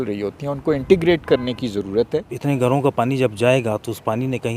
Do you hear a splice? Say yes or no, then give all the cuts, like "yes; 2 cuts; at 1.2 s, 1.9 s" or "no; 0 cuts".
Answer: yes; 1 cut; at 2.3 s